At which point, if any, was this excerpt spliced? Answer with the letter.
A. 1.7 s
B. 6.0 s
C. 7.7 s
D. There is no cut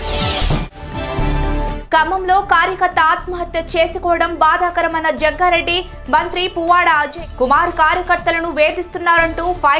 A